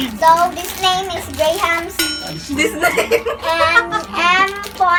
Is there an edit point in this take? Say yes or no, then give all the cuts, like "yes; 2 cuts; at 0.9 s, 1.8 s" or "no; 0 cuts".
no; 0 cuts